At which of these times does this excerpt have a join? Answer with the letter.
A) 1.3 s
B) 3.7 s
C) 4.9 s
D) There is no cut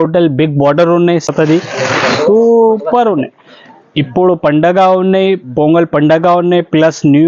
A